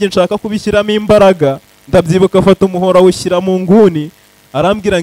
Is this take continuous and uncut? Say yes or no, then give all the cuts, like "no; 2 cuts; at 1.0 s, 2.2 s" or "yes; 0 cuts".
yes; 0 cuts